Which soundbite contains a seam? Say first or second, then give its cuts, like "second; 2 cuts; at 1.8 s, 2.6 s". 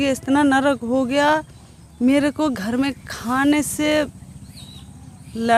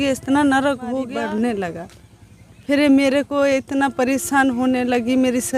second; 1 cut; at 1.1 s